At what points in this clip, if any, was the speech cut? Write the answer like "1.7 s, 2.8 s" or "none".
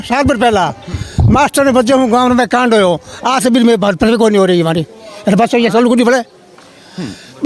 none